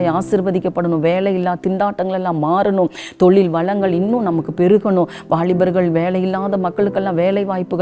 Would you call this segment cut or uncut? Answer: uncut